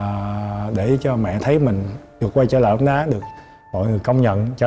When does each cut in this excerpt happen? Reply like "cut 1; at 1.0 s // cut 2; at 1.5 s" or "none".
none